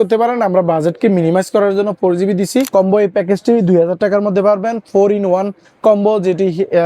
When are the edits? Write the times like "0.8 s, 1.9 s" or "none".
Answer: 2.7 s